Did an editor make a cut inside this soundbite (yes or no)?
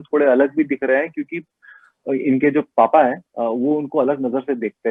no